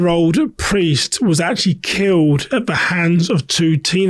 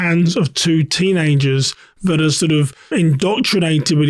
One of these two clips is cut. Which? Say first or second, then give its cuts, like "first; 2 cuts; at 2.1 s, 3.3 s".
second; 1 cut; at 2.9 s